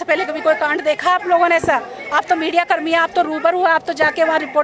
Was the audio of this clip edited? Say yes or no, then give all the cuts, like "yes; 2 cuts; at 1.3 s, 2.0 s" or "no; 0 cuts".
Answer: no; 0 cuts